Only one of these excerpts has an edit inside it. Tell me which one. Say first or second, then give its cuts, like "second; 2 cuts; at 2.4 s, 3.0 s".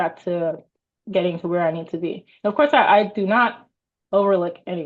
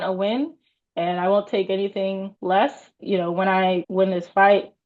second; 3 cuts; at 2.3 s, 3.0 s, 3.9 s